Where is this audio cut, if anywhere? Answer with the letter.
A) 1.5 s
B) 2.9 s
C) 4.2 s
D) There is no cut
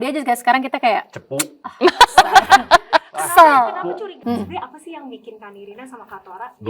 C